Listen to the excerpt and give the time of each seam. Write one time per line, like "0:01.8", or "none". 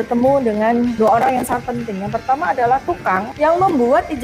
0:00.9
0:03.3